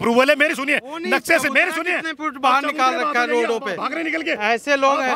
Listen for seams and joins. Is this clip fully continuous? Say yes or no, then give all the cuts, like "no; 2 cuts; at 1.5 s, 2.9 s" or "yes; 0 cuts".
yes; 0 cuts